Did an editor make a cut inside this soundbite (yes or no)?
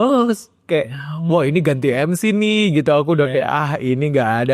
no